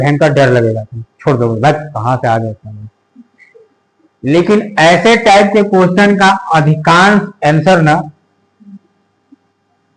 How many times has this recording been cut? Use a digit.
0